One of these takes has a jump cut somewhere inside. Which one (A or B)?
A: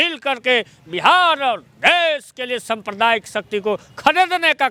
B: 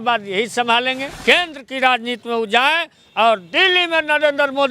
B